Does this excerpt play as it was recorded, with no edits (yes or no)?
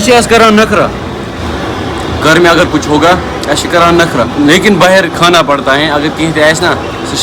yes